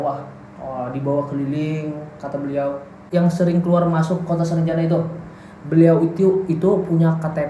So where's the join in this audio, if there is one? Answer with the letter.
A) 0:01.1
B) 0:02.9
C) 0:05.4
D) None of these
B